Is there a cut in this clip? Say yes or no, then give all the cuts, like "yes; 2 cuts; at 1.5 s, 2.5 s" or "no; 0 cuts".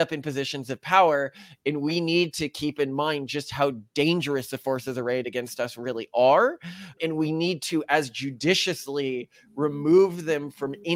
no; 0 cuts